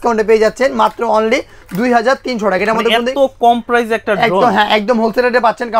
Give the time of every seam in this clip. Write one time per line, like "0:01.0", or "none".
none

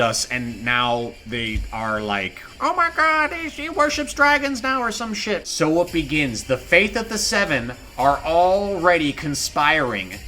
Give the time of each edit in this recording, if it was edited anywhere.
0:02.4
0:05.5

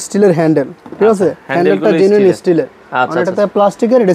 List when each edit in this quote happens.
none

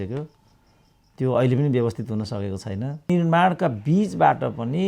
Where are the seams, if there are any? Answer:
0:03.1

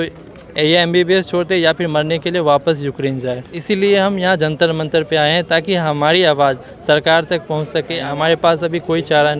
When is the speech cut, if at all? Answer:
0:03.5
0:08.0

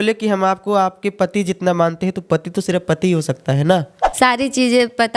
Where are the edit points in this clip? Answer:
0:04.0

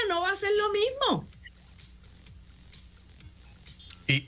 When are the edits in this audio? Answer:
none

